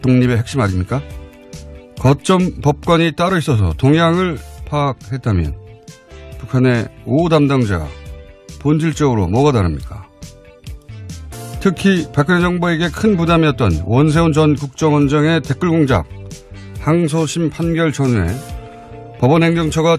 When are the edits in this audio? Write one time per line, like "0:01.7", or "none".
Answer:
none